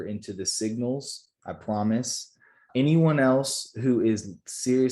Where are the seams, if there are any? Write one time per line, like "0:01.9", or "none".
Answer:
0:02.6